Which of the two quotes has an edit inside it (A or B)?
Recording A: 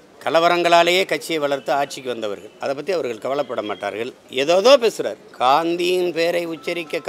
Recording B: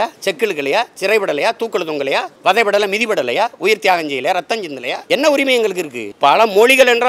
B